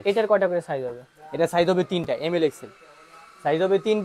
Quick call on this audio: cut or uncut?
uncut